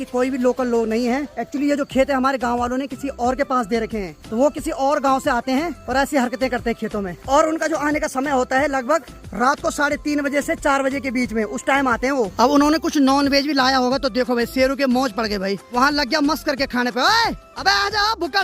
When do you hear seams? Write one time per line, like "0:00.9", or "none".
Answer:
none